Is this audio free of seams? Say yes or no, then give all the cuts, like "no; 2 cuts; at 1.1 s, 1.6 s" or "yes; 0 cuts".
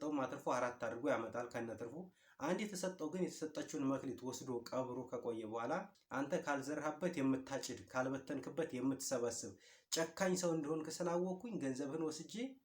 no; 1 cut; at 6.0 s